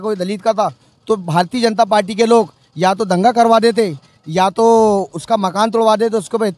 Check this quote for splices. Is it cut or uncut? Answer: uncut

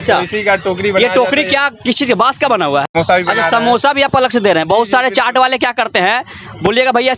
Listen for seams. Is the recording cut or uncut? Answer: cut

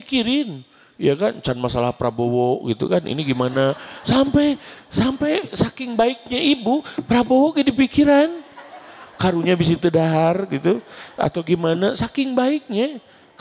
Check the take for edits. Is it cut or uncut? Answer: uncut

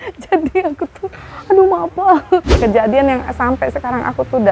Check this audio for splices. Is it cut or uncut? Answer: cut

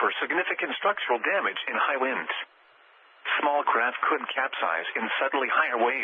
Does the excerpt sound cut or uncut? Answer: uncut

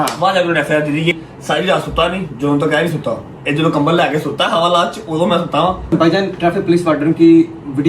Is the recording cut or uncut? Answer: cut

